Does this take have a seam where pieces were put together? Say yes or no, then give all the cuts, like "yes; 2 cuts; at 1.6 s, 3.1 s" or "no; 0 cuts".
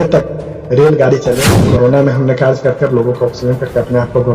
yes; 1 cut; at 1.5 s